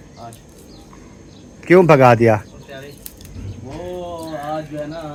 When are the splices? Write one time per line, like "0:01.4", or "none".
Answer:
none